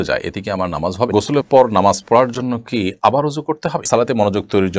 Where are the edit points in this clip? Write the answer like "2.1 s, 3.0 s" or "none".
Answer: 1.1 s, 3.9 s